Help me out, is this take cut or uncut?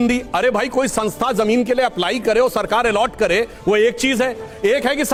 uncut